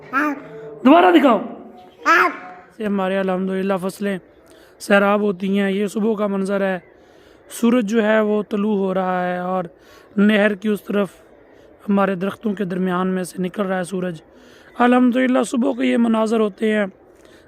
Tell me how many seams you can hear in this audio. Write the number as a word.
one